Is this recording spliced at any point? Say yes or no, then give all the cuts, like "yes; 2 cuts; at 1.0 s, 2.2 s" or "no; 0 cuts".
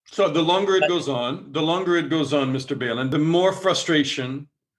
yes; 1 cut; at 3.1 s